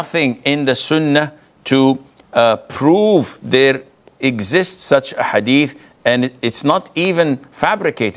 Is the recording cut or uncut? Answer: uncut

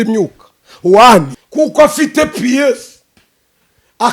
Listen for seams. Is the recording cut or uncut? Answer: cut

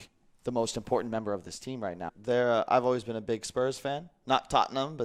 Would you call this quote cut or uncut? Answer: cut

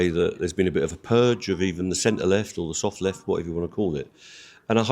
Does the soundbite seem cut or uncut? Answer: uncut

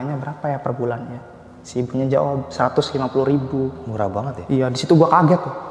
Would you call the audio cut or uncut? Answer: uncut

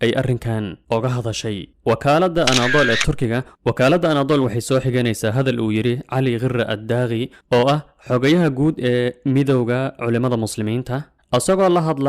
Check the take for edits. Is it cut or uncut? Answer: uncut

